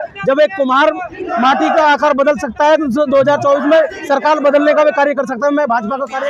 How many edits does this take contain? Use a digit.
0